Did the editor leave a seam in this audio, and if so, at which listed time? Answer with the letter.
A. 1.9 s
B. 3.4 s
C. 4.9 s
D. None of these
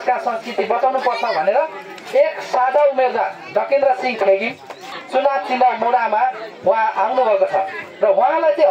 C